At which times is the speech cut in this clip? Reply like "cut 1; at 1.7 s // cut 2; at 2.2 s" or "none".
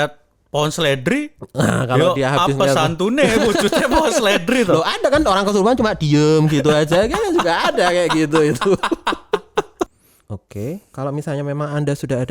cut 1; at 10.1 s